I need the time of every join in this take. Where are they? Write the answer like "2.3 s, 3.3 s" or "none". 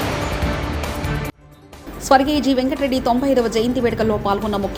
none